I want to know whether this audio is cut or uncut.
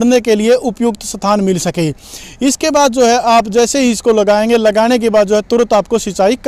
uncut